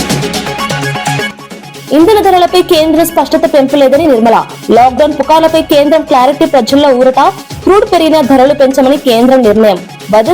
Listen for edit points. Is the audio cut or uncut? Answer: cut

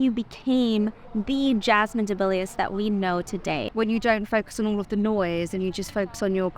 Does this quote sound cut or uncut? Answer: cut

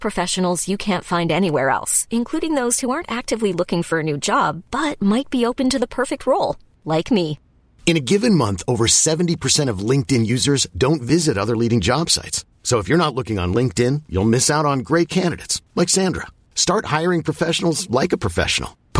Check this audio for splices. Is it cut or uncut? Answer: uncut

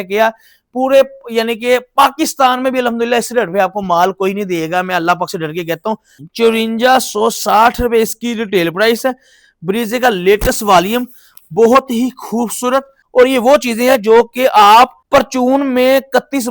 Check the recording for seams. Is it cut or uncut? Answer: cut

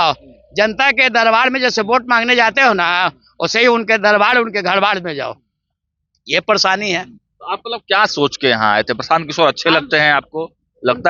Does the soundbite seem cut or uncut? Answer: uncut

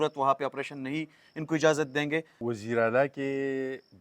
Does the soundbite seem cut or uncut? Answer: cut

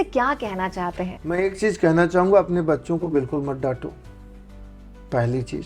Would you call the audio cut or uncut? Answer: uncut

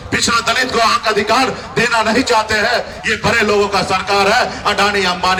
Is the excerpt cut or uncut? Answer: uncut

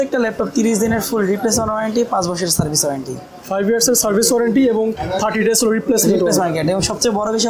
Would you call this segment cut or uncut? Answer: uncut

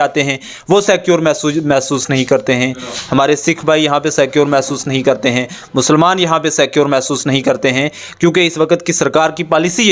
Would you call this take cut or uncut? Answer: uncut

